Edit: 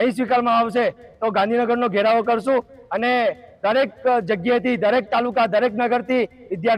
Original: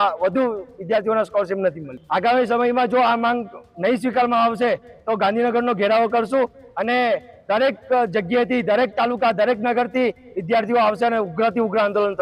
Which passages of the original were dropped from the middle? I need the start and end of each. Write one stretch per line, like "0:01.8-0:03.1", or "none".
none